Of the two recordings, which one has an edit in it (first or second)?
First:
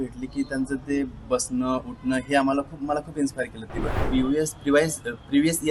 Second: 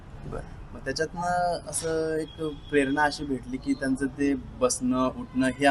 first